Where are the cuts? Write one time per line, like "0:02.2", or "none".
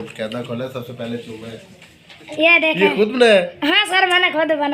0:02.3